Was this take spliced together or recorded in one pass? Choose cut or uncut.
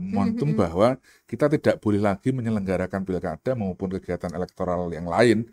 uncut